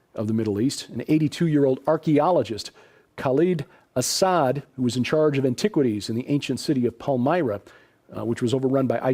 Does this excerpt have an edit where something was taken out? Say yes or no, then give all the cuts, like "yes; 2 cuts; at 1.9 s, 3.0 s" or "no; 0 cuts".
yes; 1 cut; at 6.5 s